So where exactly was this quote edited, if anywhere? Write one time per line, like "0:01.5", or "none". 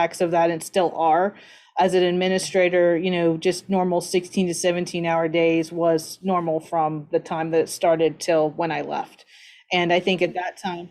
none